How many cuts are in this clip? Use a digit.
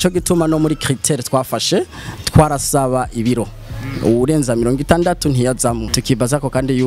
1